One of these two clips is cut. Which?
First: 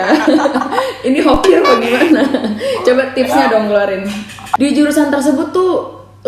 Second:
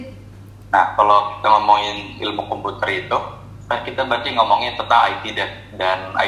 first; 1 cut; at 4.4 s

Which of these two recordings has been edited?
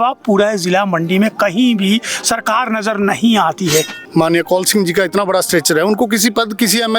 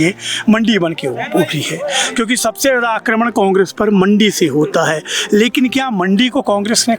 first; 1 cut; at 4.0 s

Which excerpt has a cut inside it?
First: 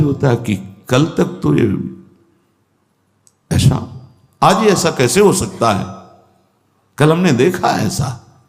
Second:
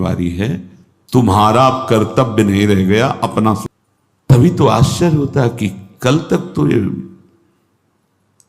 second; 1 cut; at 3.7 s

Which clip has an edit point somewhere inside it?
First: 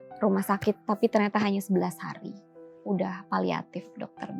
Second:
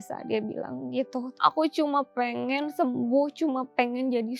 second; 1 cut; at 1.3 s

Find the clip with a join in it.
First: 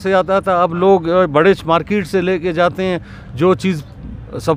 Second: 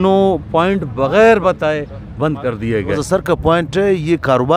second; 1 cut; at 3.0 s

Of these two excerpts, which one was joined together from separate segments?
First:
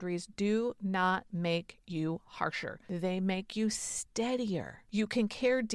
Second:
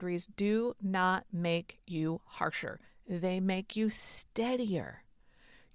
first; 2 cuts; at 2.7 s, 4.8 s

